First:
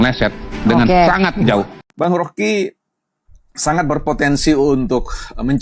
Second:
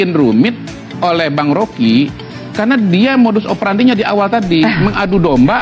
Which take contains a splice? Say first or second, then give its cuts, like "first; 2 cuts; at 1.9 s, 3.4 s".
first; 1 cut; at 1.8 s